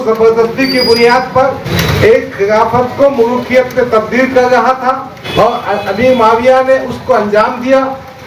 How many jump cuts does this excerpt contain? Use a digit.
2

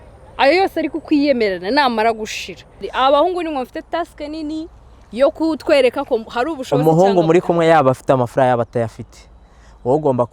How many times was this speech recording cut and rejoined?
1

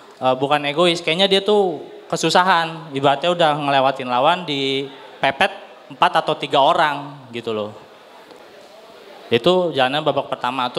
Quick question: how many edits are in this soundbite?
0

